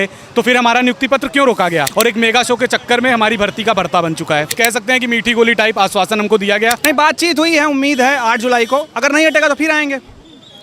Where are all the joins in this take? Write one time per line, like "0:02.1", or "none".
0:01.9
0:04.5
0:06.8